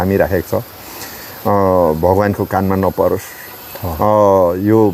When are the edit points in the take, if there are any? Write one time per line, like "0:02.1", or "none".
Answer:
none